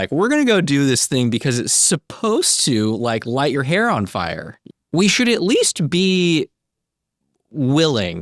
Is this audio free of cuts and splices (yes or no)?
no